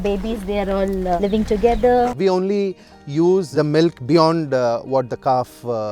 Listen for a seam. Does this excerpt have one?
yes; 2 cuts; at 1.2 s, 2.1 s

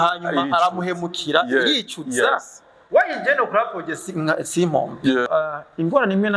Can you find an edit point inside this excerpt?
yes; 1 cut; at 5.3 s

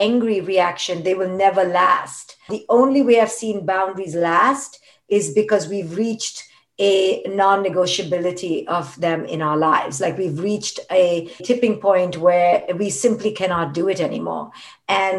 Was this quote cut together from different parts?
yes; 2 cuts; at 2.5 s, 11.4 s

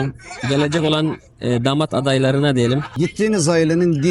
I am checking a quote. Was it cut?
yes; 1 cut; at 2.9 s

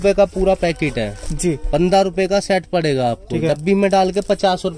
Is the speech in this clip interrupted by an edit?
no; 0 cuts

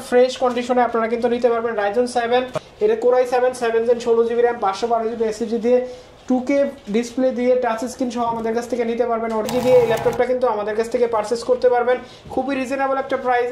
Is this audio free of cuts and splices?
no; 2 cuts; at 2.5 s, 9.5 s

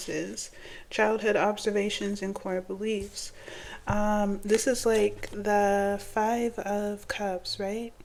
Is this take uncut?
yes; 0 cuts

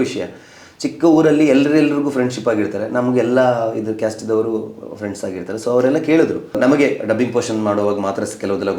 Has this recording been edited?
yes; 1 cut; at 6.6 s

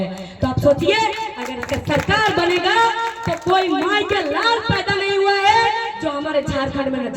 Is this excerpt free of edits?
yes; 0 cuts

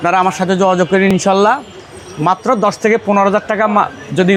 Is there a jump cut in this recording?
no; 0 cuts

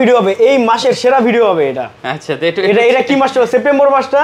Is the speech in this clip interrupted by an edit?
no; 0 cuts

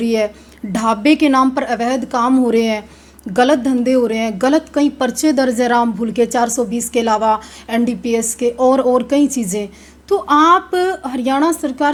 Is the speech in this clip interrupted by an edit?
no; 0 cuts

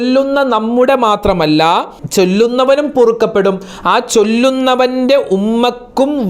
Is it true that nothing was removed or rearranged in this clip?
no; 1 cut; at 2.0 s

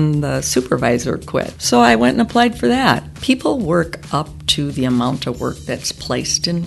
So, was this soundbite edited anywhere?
yes; 2 cuts; at 1.6 s, 3.1 s

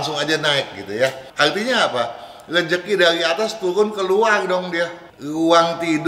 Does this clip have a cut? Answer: yes; 2 cuts; at 1.2 s, 5.0 s

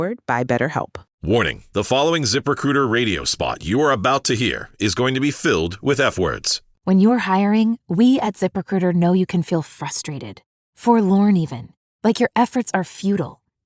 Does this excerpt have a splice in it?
yes; 1 cut; at 1.1 s

